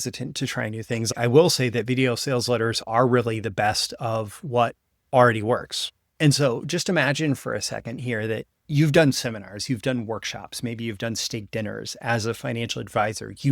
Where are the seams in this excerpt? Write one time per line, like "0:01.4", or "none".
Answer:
0:01.1
0:08.5